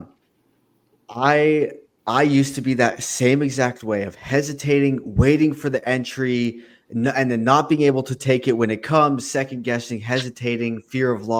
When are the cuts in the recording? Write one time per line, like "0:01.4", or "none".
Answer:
none